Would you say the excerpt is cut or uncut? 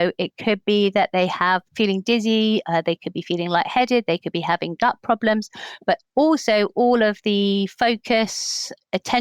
cut